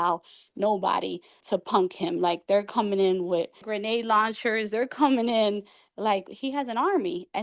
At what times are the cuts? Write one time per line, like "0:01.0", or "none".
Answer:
0:01.4
0:03.7

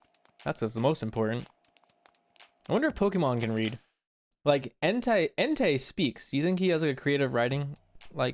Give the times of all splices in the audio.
none

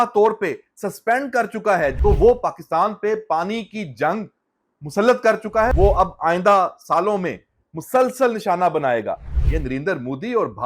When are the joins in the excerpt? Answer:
0:02.0
0:05.7

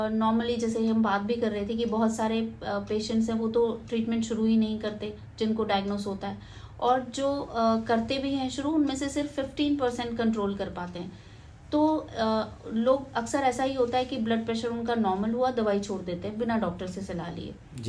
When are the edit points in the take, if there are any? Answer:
none

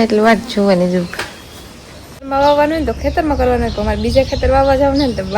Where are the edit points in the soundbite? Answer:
0:02.3

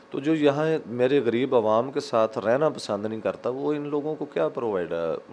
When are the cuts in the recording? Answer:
none

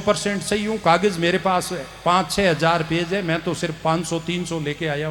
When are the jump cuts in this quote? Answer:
none

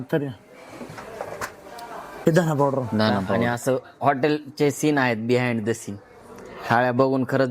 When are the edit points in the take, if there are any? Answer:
0:03.4

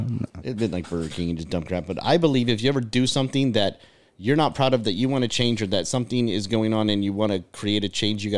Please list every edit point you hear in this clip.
none

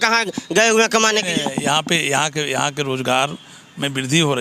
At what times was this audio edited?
none

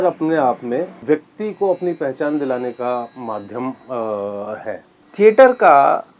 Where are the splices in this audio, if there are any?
0:01.0
0:05.0

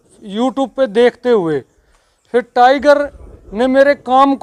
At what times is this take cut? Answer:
none

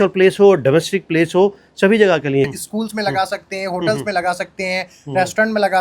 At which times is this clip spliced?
0:02.5

